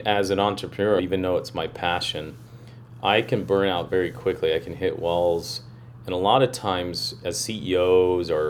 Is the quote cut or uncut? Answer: cut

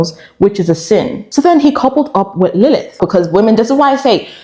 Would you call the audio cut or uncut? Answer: cut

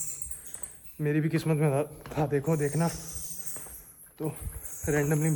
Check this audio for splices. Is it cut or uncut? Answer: uncut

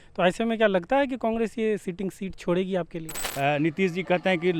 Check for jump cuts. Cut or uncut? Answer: cut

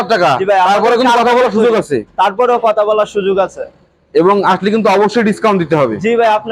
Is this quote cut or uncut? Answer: uncut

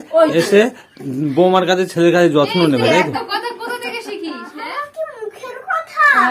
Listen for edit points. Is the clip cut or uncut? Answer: cut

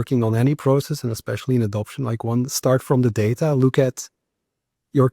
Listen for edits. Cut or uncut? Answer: uncut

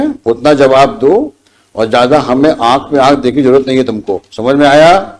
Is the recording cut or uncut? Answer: uncut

